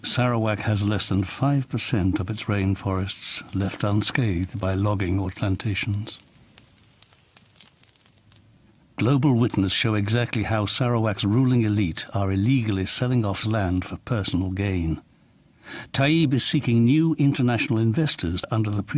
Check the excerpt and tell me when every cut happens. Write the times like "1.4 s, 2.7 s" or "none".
14.0 s